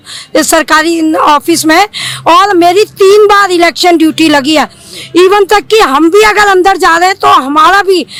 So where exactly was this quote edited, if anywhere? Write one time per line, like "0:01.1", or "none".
none